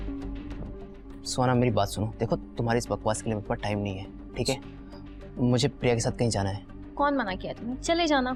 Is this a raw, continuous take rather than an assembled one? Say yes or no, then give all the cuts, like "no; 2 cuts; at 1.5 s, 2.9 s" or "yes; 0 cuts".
yes; 0 cuts